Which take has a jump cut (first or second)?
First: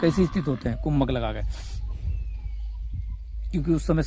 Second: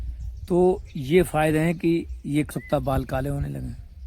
second